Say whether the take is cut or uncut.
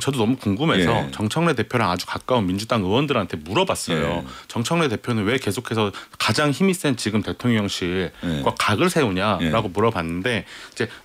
uncut